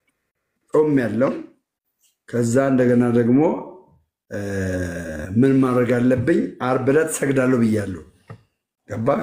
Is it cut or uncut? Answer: uncut